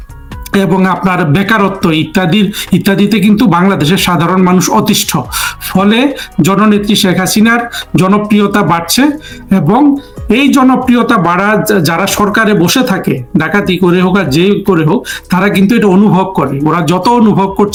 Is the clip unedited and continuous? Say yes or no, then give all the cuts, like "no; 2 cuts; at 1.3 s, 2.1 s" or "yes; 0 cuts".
yes; 0 cuts